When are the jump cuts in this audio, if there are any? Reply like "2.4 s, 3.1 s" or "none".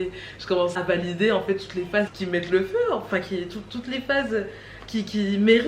0.7 s, 2.1 s